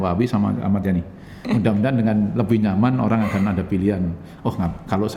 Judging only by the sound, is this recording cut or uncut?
cut